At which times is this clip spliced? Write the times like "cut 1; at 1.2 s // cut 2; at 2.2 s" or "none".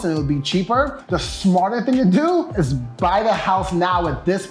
none